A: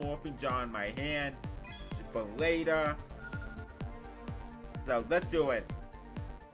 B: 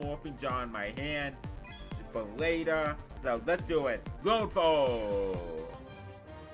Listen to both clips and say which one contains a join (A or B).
B